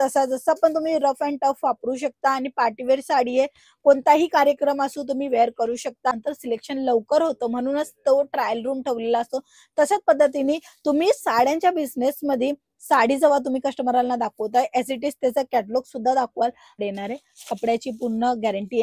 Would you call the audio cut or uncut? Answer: cut